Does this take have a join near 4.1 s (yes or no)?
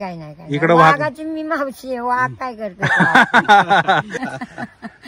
yes